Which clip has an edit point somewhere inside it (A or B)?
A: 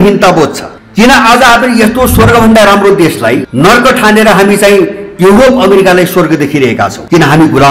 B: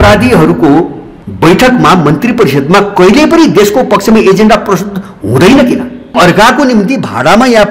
B